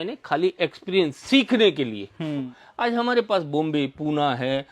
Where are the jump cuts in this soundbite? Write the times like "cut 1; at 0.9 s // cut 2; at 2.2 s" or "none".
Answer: cut 1; at 2.6 s